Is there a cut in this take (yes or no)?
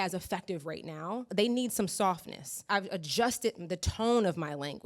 yes